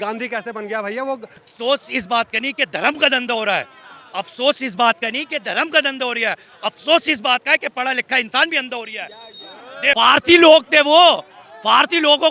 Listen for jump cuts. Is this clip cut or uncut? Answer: cut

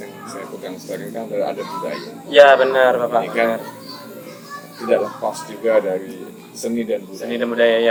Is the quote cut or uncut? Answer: uncut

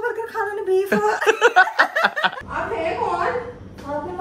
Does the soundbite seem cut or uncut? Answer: cut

